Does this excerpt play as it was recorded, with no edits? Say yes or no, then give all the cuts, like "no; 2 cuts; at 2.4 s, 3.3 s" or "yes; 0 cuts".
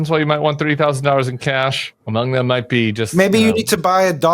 no; 1 cut; at 1.9 s